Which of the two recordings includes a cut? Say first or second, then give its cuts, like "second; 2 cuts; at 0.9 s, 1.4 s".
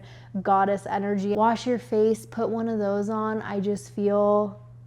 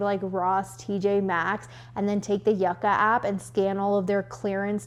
first; 1 cut; at 1.3 s